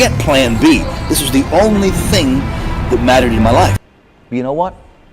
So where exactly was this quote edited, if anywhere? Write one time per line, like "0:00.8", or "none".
0:03.8